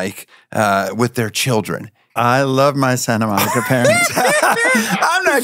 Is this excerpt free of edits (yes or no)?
yes